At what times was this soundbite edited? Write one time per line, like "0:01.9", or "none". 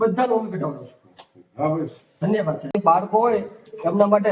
0:02.8